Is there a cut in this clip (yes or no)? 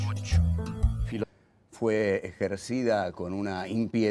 no